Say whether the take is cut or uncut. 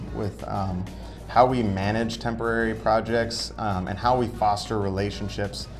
uncut